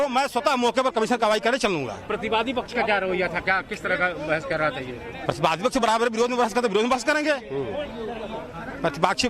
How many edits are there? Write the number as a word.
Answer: one